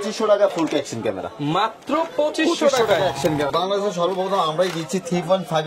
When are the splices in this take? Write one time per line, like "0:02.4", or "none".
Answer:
0:03.5